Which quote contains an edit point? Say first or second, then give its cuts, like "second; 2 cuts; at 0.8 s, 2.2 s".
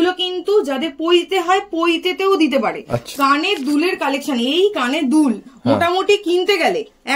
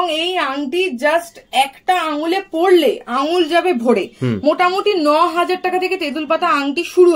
first; 1 cut; at 3.1 s